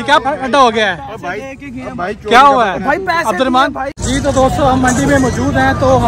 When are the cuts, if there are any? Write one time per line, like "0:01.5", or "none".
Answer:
0:03.9